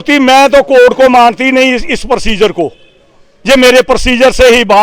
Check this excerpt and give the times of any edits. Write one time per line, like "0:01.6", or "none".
none